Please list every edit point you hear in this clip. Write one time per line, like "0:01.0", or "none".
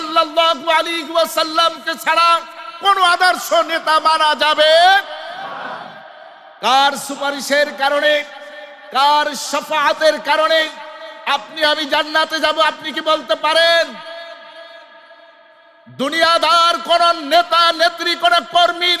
0:06.0